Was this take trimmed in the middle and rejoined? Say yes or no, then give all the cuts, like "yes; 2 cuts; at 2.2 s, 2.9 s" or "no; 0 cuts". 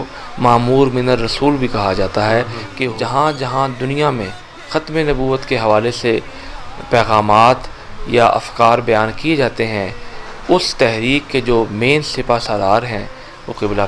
yes; 1 cut; at 2.6 s